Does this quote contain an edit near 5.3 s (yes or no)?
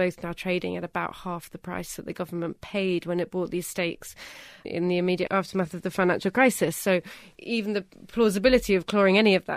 yes